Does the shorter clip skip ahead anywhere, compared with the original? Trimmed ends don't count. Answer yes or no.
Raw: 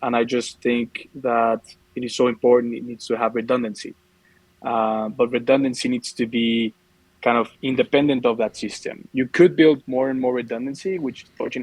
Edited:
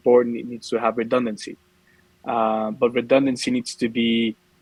no